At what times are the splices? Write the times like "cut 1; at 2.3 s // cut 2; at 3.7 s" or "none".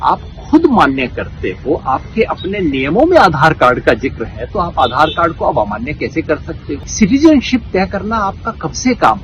cut 1; at 6.8 s